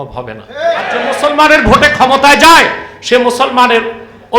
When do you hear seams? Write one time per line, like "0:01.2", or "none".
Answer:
0:01.1